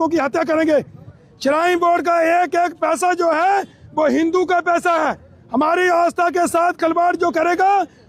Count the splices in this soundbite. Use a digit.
1